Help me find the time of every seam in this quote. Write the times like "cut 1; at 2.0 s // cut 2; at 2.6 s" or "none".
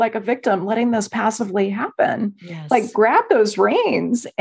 none